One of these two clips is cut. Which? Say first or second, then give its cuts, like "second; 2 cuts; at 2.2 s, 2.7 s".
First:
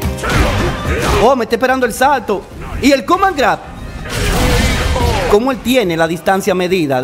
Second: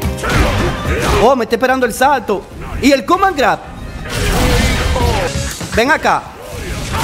second; 1 cut; at 5.3 s